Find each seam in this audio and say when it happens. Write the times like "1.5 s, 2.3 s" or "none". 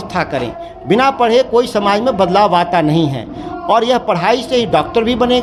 none

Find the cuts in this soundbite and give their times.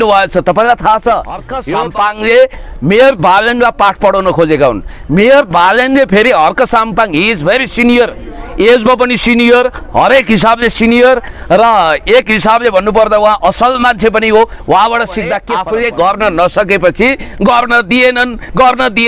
1.6 s, 15.5 s

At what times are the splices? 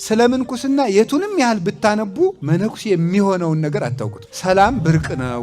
4.2 s

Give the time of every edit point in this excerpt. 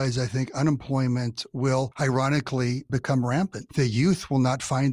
1.9 s, 3.6 s

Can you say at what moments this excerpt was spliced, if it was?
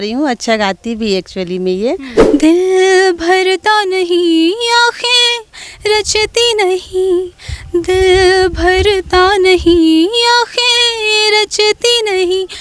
2.1 s

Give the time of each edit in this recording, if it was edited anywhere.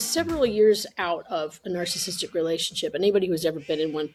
none

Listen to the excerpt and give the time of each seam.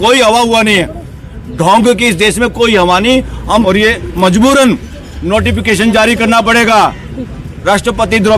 3.6 s

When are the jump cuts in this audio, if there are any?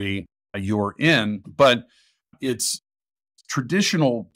1.4 s

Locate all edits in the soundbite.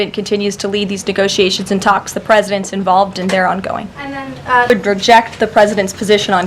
4.7 s

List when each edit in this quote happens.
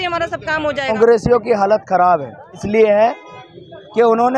0.9 s, 2.6 s

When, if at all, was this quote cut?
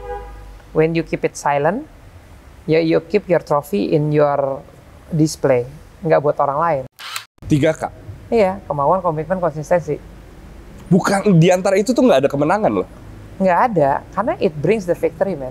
7.4 s

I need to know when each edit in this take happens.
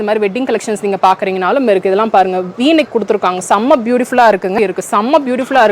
4.6 s

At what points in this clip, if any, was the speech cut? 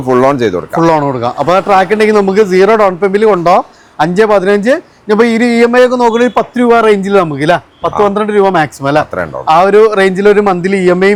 none

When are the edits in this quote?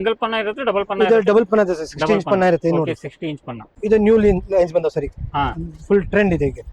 3.8 s

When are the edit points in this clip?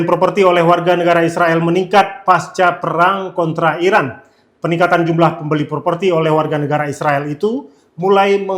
none

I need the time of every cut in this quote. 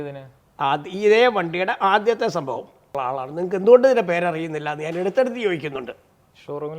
2.8 s

